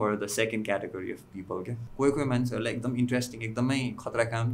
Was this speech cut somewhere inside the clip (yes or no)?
yes